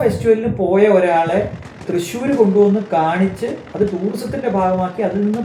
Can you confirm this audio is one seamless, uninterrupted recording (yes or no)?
yes